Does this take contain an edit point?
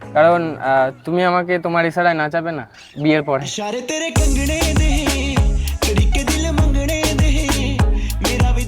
yes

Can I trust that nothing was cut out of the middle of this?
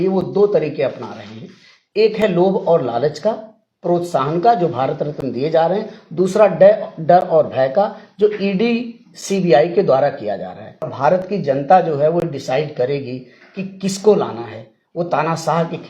no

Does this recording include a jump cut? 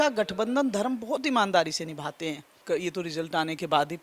yes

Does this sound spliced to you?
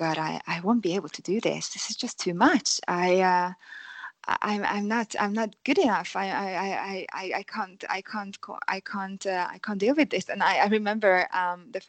no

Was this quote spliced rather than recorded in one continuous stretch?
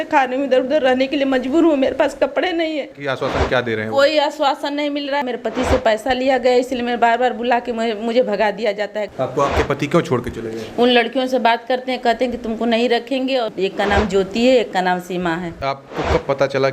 yes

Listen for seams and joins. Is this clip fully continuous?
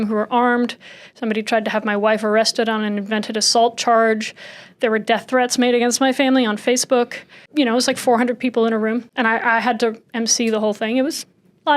no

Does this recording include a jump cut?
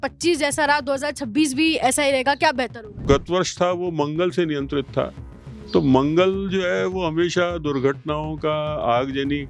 yes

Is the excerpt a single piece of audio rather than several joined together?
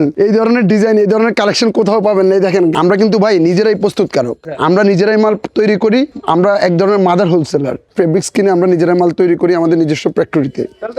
no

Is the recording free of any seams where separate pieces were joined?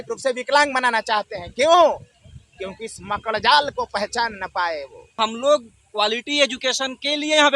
no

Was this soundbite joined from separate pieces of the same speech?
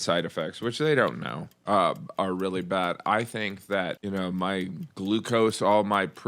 yes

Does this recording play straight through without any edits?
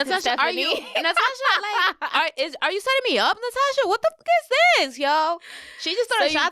yes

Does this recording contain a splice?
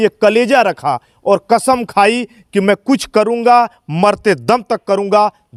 no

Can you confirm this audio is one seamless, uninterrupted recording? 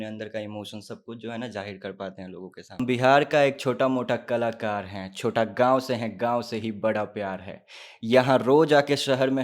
no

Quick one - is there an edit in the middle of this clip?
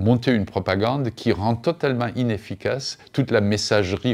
no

